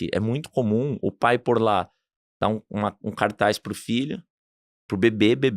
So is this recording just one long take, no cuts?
yes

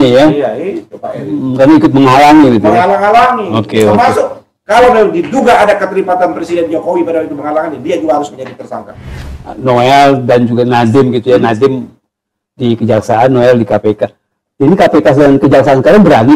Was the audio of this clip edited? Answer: yes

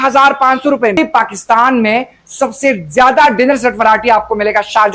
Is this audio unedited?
no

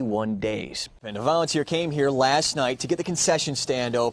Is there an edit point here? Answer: yes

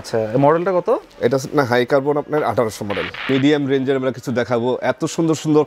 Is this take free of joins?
no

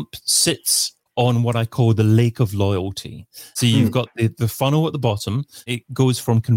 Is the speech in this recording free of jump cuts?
yes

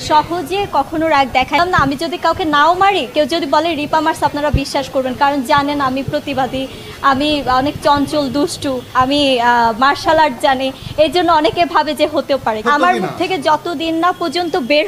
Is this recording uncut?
no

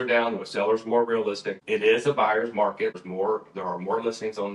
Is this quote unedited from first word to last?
no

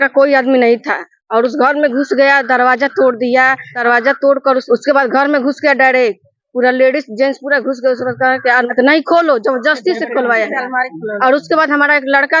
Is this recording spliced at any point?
yes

